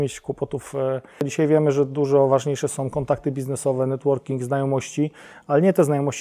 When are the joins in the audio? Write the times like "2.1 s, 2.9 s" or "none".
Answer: 1.3 s